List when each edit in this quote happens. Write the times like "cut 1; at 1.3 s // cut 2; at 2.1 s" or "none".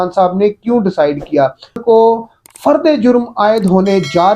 cut 1; at 1.8 s

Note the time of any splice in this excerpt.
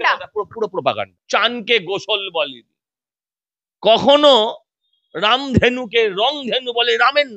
cut 1; at 1.1 s

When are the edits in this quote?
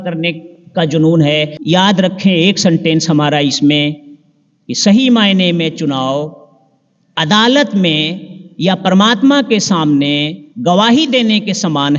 cut 1; at 1.6 s

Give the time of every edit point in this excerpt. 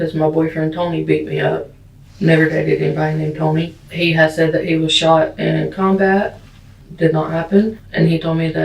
cut 1; at 3.8 s // cut 2; at 7.8 s

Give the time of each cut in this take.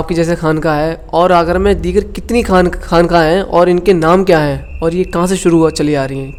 none

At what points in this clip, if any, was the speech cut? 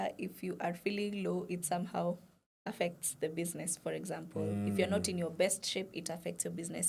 none

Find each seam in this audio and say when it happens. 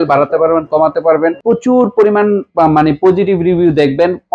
cut 1; at 1.4 s

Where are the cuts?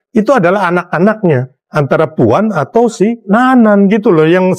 cut 1; at 1.7 s // cut 2; at 3.2 s

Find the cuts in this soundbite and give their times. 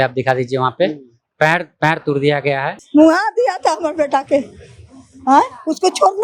cut 1; at 2.7 s

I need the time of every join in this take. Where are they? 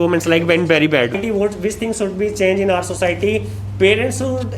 cut 1; at 1.2 s

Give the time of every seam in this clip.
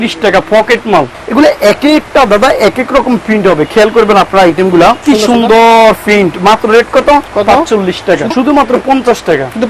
cut 1; at 1.2 s // cut 2; at 5.0 s // cut 3; at 8.3 s

